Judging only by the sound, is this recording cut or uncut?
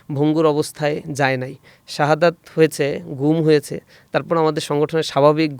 uncut